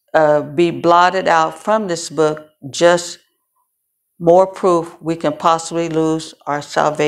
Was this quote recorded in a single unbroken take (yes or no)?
yes